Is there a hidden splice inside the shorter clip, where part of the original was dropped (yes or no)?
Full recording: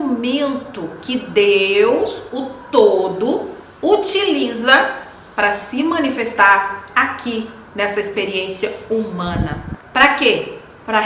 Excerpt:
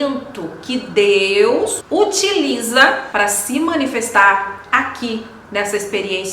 yes